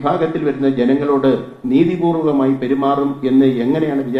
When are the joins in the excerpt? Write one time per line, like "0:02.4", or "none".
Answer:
none